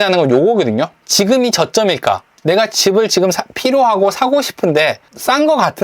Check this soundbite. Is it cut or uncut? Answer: cut